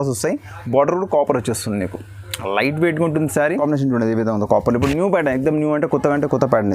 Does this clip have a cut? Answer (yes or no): yes